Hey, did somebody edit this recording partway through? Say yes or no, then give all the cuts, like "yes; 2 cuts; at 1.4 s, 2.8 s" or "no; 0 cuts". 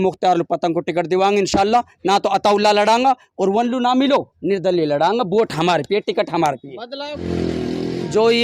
yes; 1 cut; at 7.2 s